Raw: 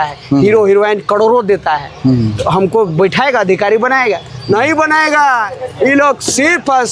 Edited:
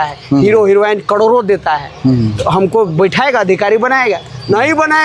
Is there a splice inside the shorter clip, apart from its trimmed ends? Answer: no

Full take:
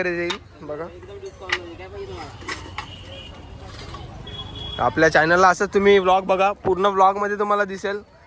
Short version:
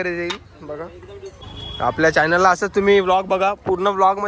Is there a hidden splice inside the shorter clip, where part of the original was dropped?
yes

